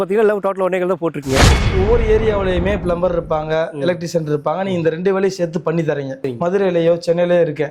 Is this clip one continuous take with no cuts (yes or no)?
no